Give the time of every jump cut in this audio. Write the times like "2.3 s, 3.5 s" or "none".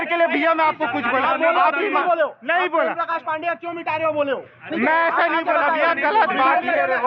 none